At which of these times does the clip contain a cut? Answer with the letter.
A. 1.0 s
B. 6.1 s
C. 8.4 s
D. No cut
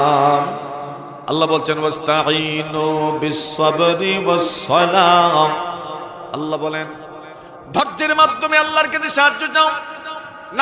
A